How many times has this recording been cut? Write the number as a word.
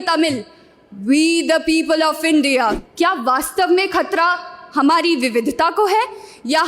one